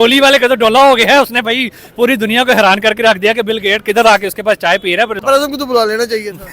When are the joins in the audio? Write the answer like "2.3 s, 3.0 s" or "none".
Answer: 5.2 s